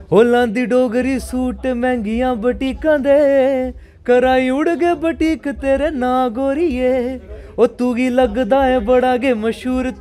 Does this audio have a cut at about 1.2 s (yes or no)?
no